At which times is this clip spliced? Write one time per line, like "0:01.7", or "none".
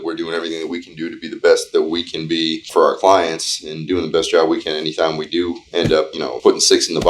0:02.6
0:06.1